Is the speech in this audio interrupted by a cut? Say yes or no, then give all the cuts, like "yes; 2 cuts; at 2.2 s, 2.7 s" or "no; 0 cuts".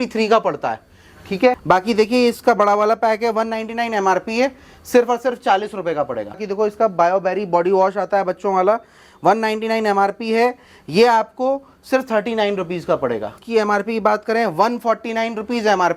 yes; 3 cuts; at 1.5 s, 6.4 s, 13.3 s